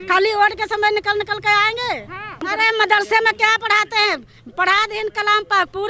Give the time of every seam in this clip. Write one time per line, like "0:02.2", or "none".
0:02.5